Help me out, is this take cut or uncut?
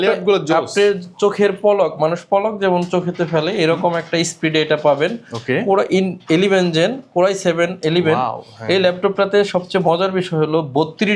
uncut